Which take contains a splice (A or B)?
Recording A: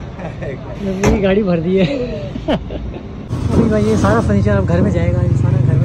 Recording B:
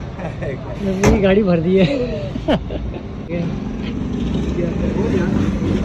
A